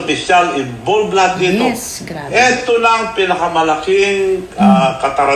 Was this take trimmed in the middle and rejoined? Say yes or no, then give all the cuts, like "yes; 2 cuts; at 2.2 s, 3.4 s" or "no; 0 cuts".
no; 0 cuts